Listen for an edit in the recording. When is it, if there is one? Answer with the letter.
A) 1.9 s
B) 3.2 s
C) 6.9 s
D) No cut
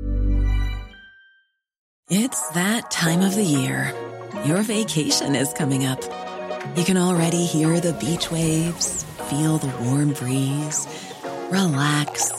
A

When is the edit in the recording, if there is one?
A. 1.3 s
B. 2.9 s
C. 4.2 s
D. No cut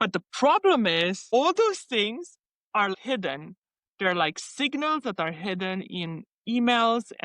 B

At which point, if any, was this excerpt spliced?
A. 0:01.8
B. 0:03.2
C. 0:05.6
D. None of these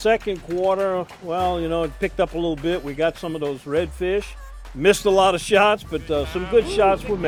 D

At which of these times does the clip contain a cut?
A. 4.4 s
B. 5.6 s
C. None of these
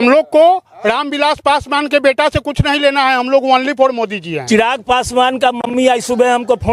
A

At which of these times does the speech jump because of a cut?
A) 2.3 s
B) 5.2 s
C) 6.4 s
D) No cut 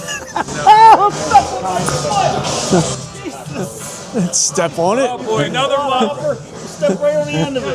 D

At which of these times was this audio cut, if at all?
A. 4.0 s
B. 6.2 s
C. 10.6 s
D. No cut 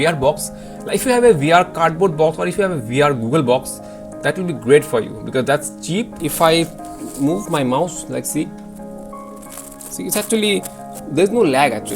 B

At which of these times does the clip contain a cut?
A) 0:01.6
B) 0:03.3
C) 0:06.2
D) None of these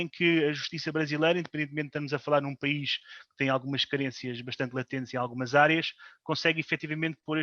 D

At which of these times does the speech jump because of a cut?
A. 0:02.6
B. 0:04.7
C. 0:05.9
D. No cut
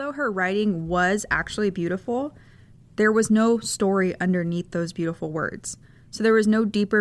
D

